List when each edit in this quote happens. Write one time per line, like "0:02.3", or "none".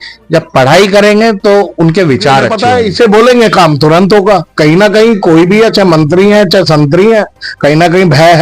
0:02.5